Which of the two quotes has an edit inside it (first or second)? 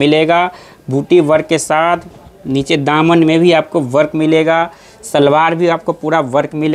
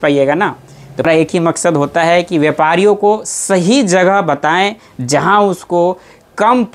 second